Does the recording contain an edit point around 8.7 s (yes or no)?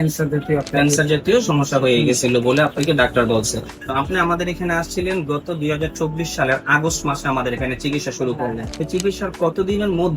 yes